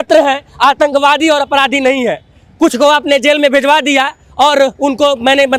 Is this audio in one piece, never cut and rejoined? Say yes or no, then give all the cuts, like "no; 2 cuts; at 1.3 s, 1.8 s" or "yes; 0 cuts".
yes; 0 cuts